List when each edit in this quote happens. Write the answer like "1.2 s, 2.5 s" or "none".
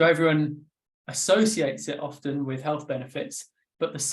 none